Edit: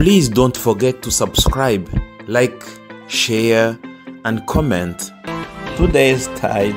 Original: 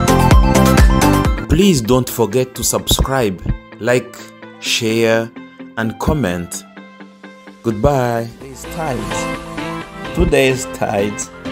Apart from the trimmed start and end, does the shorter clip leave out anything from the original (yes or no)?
yes